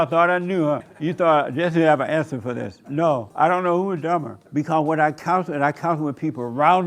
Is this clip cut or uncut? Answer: cut